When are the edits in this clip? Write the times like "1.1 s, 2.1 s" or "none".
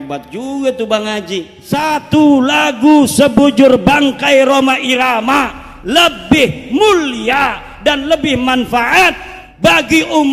1.5 s